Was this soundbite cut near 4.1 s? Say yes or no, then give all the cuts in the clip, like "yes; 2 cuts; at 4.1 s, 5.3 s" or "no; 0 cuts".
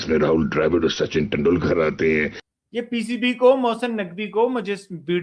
no; 1 cut; at 2.4 s